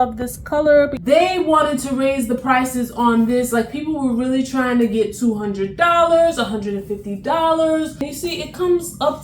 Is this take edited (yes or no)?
yes